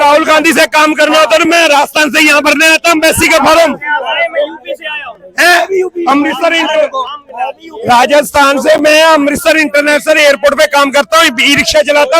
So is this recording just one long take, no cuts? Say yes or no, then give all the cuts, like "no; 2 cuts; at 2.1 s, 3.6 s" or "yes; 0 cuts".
yes; 0 cuts